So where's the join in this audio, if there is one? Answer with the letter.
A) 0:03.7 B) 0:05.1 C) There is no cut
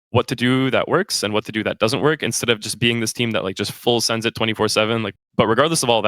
B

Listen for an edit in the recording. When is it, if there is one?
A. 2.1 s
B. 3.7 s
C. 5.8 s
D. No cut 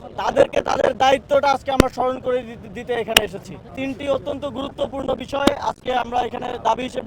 B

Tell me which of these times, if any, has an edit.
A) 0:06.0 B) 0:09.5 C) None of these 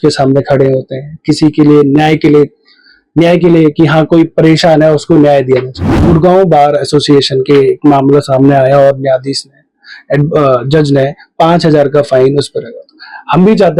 A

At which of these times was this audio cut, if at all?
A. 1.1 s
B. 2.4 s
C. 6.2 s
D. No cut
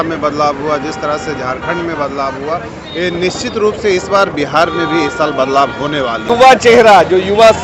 C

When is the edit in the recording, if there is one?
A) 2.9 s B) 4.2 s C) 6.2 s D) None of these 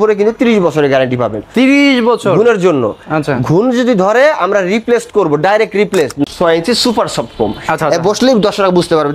C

